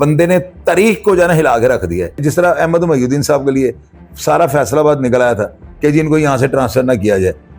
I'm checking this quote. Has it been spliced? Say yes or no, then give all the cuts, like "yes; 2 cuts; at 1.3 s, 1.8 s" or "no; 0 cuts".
yes; 1 cut; at 2.2 s